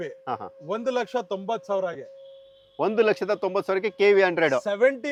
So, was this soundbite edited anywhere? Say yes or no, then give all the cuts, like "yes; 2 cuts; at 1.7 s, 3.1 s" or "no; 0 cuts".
no; 0 cuts